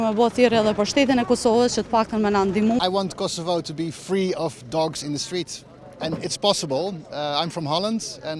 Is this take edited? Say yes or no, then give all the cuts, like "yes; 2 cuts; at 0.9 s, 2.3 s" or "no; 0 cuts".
yes; 1 cut; at 2.8 s